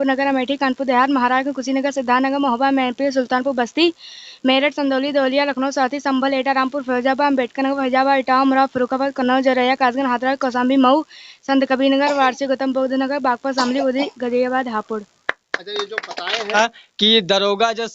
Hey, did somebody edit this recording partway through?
yes; 1 cut; at 16.5 s

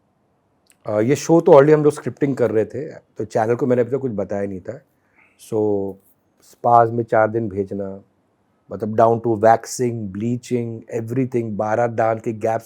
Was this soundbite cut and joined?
no; 0 cuts

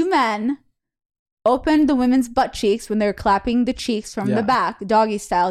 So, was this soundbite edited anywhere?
no; 0 cuts

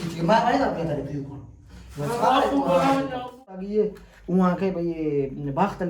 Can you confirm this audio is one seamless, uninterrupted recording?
no; 1 cut; at 3.6 s

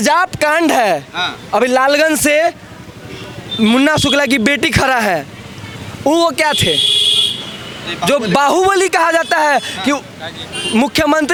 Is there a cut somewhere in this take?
no; 0 cuts

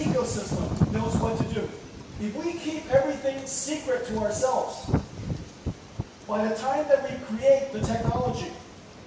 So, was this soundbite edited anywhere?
yes; 1 cut; at 2.0 s

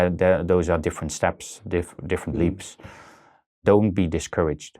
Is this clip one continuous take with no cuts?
no; 1 cut; at 3.6 s

